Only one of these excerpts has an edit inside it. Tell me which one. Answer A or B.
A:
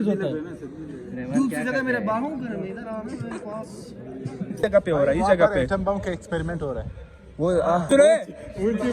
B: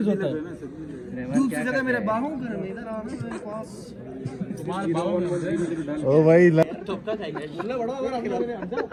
A